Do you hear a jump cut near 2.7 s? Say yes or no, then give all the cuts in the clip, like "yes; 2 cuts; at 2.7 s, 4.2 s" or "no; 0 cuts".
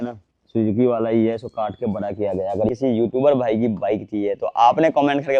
yes; 1 cut; at 2.7 s